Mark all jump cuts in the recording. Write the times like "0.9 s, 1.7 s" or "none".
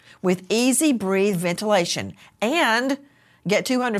none